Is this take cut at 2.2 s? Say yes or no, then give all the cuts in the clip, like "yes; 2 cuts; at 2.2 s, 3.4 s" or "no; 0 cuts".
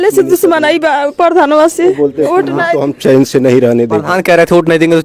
yes; 1 cut; at 2.2 s